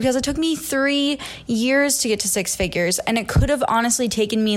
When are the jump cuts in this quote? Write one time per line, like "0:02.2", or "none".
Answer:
none